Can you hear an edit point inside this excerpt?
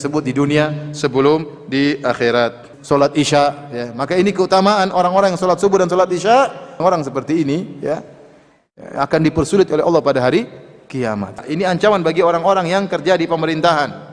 yes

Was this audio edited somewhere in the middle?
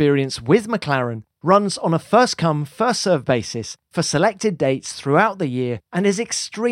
yes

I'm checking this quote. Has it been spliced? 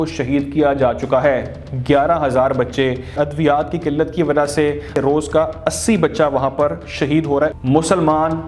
yes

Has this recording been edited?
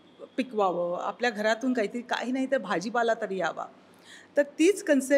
no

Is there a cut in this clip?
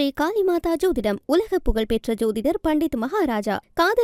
no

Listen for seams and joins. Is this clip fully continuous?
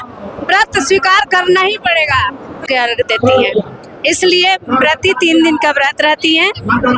no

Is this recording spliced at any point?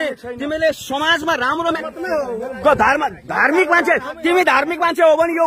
yes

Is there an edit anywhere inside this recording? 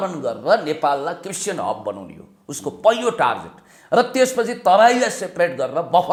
no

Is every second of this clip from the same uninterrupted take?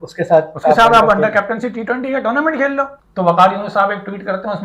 no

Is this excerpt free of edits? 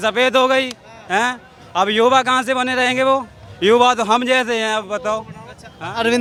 yes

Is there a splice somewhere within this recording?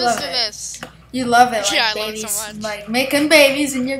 no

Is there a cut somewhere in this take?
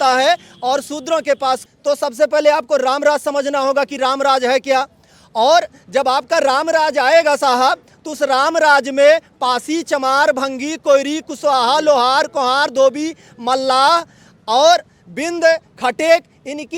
yes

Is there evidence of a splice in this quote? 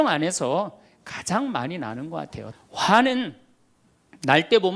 yes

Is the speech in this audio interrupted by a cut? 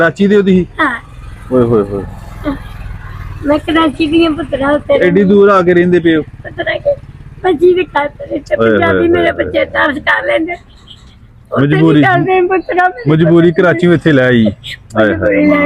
no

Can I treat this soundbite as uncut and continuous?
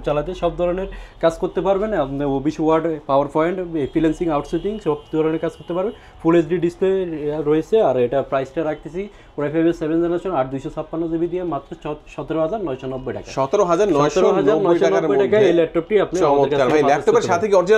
yes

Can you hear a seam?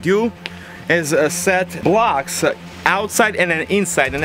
yes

